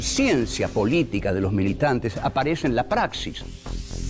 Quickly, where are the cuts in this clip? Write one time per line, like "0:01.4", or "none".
0:01.1